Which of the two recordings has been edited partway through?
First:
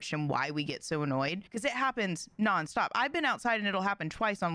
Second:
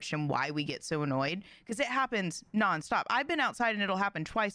first; 1 cut; at 1.5 s

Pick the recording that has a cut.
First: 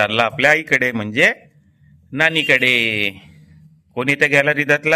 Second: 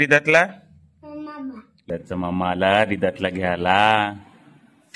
second; 1 cut; at 1.8 s

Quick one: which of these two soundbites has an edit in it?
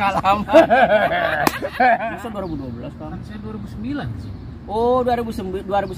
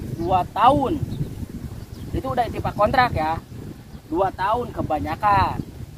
first; 1 cut; at 2.2 s

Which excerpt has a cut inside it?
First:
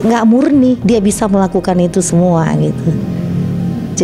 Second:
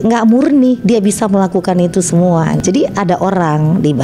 second; 1 cut; at 2.6 s

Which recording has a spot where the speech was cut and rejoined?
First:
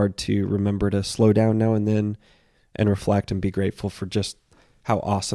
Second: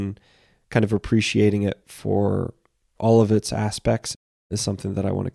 second; 1 cut; at 4.1 s

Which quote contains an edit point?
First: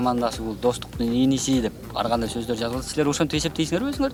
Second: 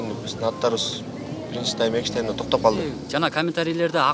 second; 1 cut; at 3.0 s

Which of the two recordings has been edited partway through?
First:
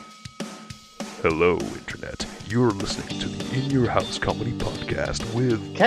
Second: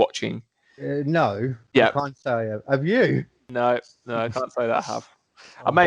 second; 1 cut; at 3.4 s

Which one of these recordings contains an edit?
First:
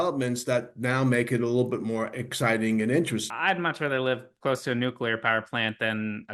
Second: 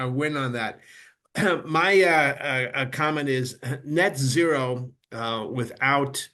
first; 1 cut; at 3.3 s

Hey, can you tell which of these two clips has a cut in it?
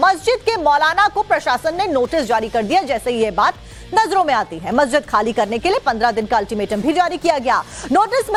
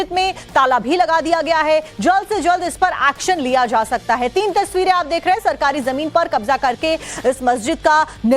second; 1 cut; at 5.4 s

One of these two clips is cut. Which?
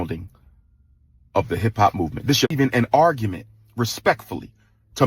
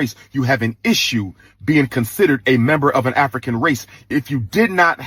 first; 1 cut; at 2.5 s

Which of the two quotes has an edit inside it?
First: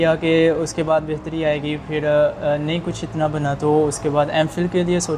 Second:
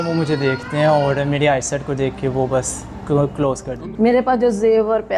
second; 1 cut; at 3.7 s

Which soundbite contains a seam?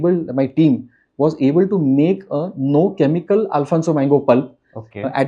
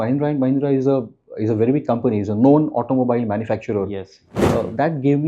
second; 1 cut; at 4.3 s

